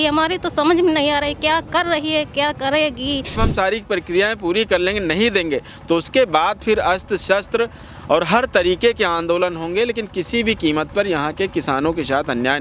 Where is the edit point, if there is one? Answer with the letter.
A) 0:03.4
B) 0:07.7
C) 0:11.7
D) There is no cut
A